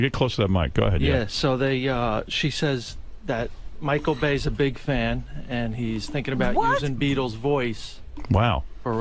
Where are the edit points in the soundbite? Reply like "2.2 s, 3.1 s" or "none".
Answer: 8.1 s